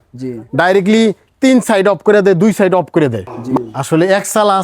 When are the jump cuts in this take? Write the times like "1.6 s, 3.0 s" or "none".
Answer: 3.4 s